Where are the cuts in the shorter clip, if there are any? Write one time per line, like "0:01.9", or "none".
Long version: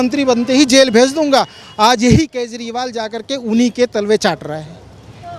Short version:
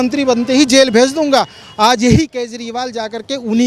none